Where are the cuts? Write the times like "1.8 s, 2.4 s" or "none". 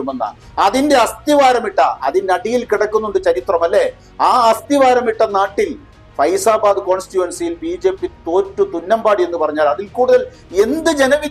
none